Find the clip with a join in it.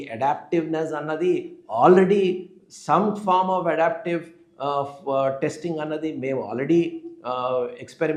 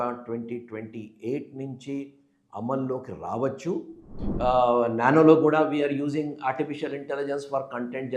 second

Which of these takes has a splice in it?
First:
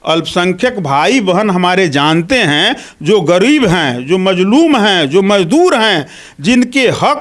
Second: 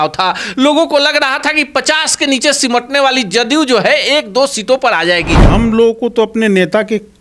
second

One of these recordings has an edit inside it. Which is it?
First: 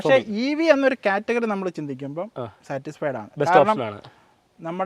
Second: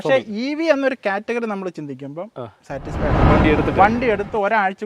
second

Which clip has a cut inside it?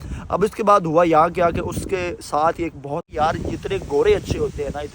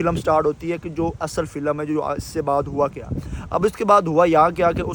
first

